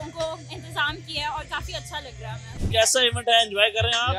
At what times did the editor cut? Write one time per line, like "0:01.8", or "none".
0:02.6